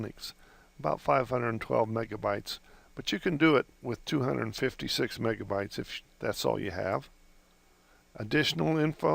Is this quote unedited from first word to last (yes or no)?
no